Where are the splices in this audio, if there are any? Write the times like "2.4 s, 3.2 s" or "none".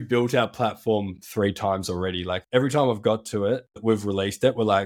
2.4 s, 3.8 s